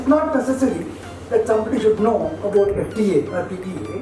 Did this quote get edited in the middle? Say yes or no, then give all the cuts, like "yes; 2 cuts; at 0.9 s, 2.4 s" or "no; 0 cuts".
no; 0 cuts